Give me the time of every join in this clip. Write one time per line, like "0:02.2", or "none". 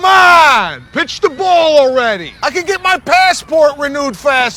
none